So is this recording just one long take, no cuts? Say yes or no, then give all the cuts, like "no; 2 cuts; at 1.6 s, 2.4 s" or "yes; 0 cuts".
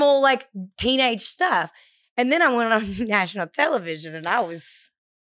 yes; 0 cuts